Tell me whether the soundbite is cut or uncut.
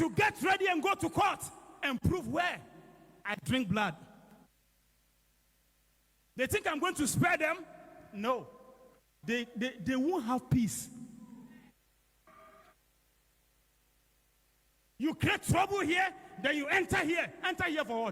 uncut